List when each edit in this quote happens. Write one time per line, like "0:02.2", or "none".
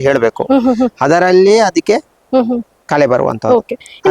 none